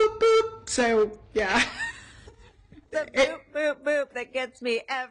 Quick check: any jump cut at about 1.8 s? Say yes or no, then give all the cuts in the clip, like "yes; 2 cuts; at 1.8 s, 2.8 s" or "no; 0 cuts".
no; 1 cut; at 3.2 s